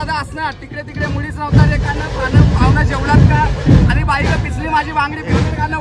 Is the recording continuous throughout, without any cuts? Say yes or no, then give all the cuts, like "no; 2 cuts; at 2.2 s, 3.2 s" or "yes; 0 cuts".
yes; 0 cuts